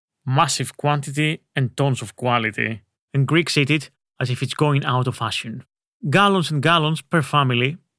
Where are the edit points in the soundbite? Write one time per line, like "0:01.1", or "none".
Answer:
none